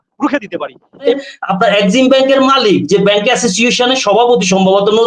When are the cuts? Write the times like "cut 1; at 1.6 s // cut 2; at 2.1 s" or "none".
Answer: cut 1; at 1.2 s

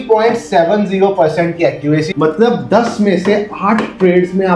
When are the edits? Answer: cut 1; at 2.1 s

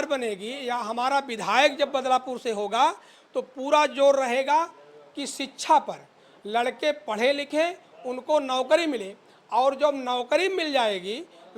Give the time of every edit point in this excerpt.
none

